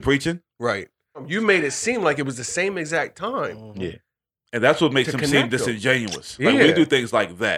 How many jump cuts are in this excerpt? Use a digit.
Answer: 1